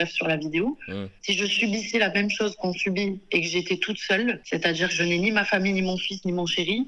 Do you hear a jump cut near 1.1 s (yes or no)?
yes